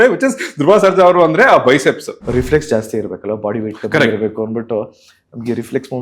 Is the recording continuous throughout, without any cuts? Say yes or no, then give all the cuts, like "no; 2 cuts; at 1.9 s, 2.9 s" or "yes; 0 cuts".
no; 1 cut; at 2.1 s